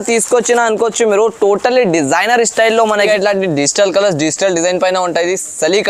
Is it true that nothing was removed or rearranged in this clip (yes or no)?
no